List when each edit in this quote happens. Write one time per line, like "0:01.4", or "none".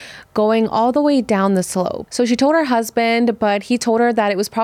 0:02.0

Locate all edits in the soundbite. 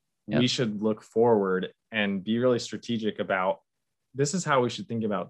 0:04.0

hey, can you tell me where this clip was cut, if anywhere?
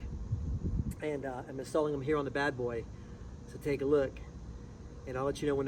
none

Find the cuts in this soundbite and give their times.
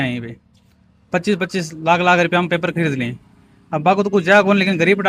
none

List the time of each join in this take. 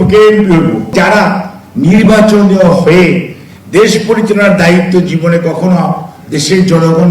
0:00.9

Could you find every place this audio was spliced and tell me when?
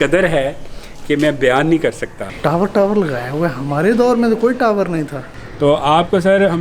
0:02.2
0:05.2

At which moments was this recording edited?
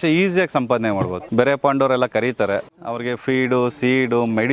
0:01.2
0:02.8

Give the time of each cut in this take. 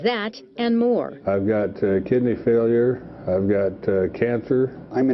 none

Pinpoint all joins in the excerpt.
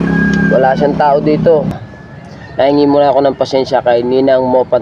0:01.7

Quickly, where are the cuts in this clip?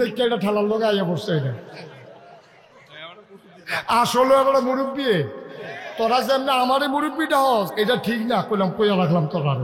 0:07.7

